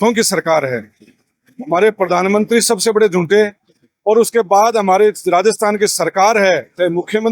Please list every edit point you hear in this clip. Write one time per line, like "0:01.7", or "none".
none